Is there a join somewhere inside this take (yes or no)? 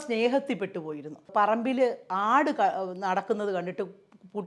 yes